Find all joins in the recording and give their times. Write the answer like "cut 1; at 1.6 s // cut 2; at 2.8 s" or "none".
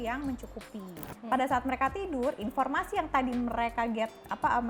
cut 1; at 1.1 s

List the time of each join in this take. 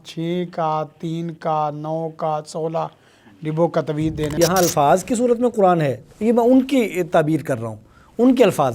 cut 1; at 4.4 s

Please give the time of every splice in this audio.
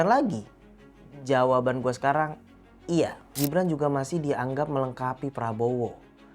cut 1; at 3.3 s

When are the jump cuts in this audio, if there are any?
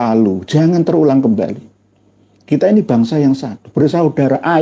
none

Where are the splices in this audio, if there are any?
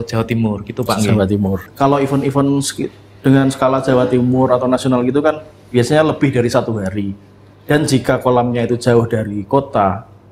cut 1; at 1.7 s

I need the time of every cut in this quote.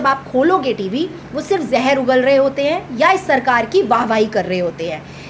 none

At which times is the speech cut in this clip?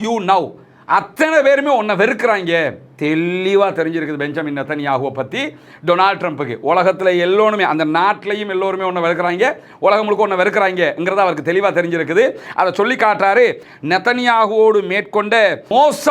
cut 1; at 13.6 s

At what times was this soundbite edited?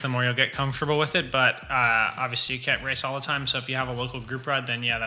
none

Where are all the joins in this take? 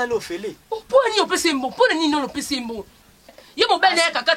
cut 1; at 3.4 s

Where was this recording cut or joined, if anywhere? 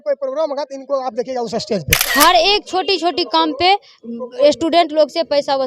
cut 1; at 2.0 s

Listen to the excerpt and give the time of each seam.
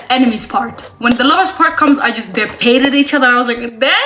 cut 1; at 2.6 s

